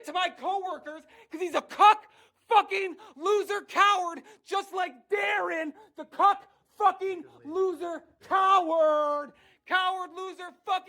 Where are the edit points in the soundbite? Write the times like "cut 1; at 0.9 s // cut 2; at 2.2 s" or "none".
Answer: cut 1; at 0.9 s